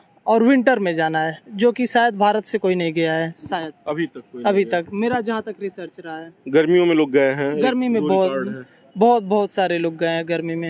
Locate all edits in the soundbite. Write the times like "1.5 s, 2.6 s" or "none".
none